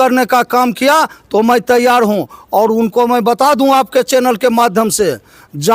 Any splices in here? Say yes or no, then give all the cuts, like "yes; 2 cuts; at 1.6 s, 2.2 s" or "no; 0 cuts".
no; 0 cuts